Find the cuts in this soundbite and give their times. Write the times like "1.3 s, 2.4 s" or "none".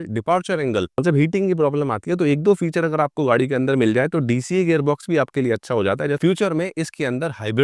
1.0 s, 6.2 s

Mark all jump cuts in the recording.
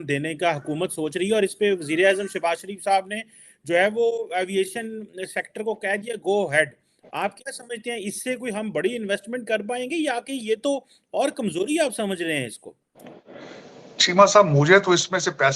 none

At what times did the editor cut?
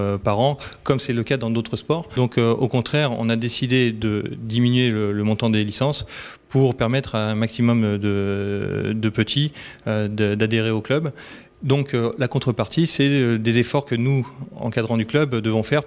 12.5 s

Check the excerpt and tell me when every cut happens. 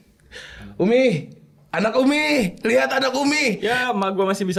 none

